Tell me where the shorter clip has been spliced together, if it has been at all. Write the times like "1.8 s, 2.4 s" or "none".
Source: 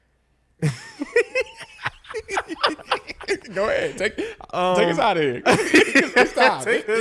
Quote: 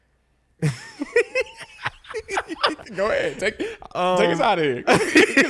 2.8 s